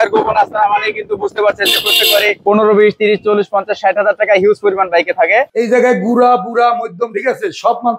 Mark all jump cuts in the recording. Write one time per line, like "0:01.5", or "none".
0:05.5